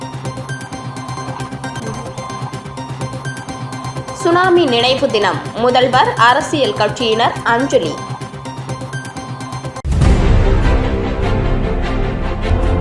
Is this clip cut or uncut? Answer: uncut